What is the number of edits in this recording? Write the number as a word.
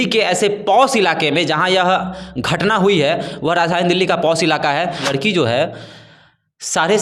one